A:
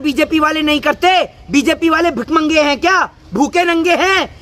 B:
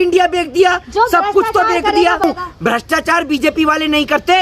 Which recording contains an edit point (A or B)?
B